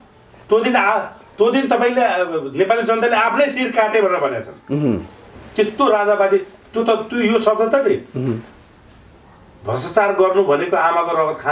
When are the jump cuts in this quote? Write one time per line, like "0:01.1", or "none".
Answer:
none